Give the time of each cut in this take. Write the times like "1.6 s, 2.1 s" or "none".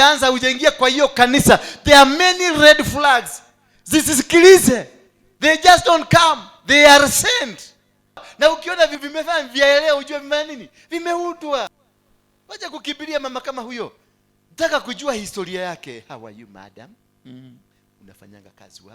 9.0 s